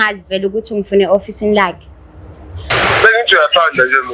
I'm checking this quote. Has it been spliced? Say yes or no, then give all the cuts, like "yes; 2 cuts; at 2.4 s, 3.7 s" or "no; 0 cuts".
yes; 1 cut; at 2.6 s